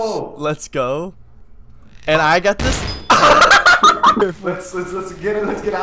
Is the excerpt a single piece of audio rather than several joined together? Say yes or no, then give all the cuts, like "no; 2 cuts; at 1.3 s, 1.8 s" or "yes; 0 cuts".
no; 1 cut; at 4.2 s